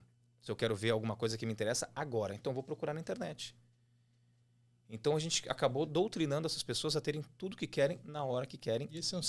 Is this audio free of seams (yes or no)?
yes